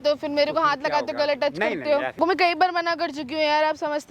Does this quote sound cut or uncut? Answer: cut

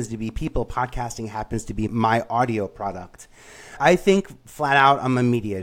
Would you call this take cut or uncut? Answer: uncut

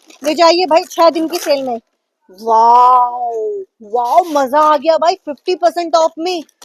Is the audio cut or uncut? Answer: uncut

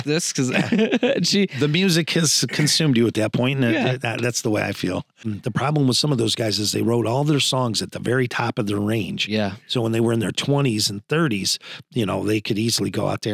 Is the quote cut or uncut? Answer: cut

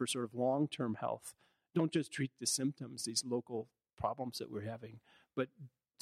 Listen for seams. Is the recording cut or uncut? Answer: uncut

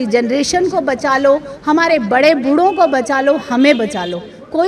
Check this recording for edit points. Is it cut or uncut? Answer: uncut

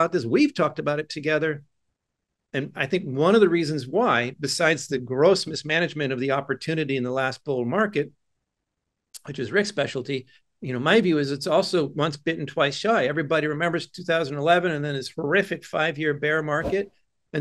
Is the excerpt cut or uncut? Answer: uncut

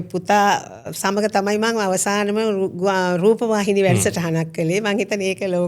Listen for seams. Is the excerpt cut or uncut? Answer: uncut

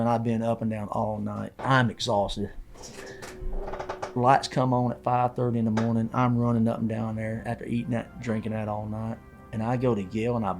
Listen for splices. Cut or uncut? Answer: cut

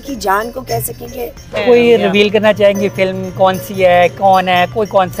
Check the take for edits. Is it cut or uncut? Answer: cut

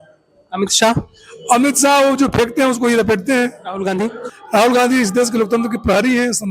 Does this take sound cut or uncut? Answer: cut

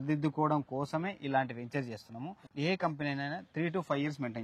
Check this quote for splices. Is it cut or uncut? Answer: cut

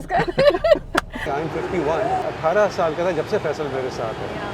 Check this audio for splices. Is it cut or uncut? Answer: cut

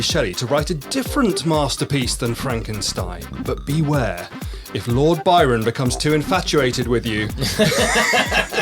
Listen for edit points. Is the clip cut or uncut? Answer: cut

